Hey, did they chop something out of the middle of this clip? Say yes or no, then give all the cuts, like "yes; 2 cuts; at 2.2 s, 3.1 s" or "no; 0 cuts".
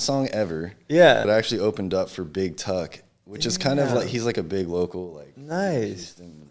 yes; 1 cut; at 1.3 s